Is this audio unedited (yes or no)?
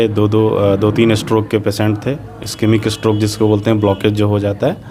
yes